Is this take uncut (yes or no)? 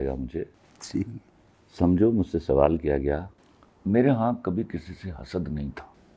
no